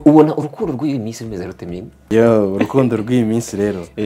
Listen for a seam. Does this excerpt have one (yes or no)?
yes